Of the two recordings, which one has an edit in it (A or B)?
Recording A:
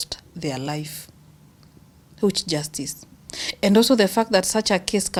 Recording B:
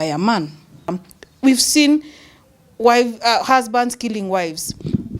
B